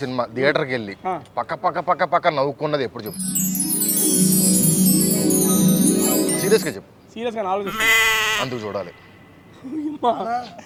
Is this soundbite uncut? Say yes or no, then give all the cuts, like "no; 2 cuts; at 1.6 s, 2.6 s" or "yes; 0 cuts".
yes; 0 cuts